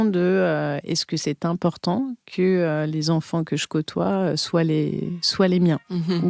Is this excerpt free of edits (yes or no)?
yes